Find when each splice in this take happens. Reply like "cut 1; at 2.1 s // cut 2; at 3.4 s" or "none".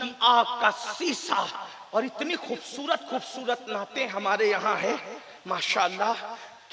none